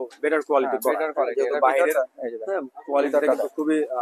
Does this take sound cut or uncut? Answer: uncut